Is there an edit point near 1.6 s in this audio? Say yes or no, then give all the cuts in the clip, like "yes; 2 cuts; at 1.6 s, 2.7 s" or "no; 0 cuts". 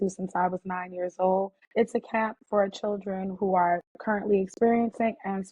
yes; 1 cut; at 1.6 s